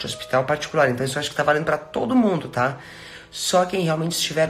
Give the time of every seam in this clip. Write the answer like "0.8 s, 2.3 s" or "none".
none